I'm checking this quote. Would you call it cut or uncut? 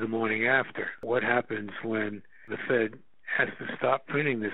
cut